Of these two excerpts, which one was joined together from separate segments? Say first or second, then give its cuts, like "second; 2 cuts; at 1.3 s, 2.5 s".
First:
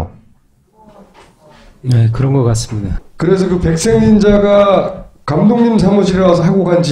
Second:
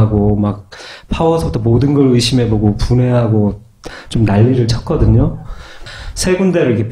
second; 1 cut; at 3.7 s